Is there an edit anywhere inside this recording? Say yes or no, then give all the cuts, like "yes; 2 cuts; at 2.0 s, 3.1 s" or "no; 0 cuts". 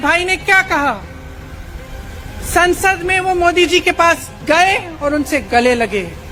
no; 0 cuts